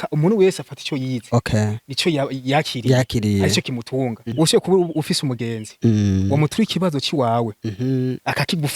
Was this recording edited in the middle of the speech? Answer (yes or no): yes